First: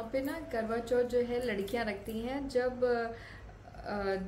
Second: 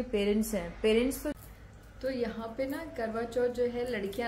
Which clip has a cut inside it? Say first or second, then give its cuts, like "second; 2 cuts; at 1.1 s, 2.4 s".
second; 1 cut; at 1.3 s